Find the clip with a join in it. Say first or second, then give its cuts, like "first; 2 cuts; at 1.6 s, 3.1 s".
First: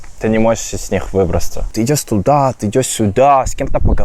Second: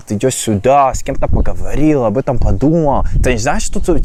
first; 1 cut; at 1.6 s